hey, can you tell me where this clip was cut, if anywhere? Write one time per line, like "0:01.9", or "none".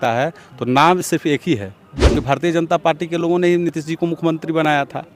0:02.1